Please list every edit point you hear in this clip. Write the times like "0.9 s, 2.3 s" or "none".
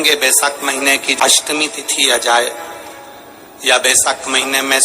1.1 s